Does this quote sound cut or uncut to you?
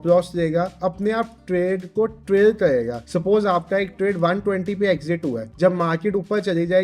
cut